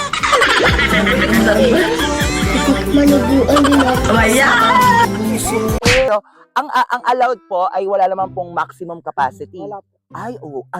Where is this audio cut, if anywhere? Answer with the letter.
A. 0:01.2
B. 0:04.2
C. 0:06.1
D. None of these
C